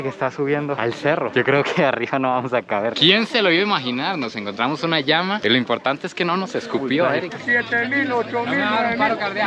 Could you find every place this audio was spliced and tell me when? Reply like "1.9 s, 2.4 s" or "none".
3.0 s, 7.3 s